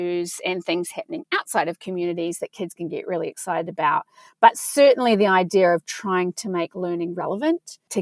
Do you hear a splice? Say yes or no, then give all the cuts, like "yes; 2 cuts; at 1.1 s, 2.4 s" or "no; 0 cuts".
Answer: no; 0 cuts